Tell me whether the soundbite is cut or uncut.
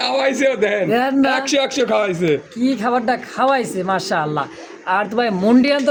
uncut